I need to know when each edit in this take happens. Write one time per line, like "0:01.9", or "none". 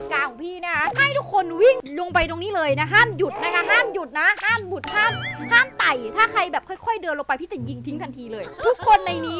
none